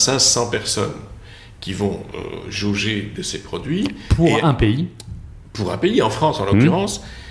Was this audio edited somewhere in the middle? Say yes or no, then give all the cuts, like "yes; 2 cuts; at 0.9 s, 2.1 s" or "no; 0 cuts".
no; 0 cuts